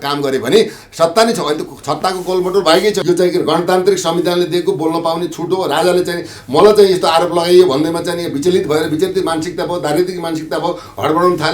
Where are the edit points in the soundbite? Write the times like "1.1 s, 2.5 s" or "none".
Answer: 3.0 s